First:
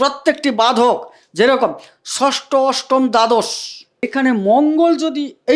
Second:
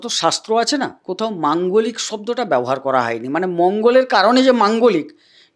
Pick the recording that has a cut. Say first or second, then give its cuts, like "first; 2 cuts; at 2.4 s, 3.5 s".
first; 1 cut; at 4.1 s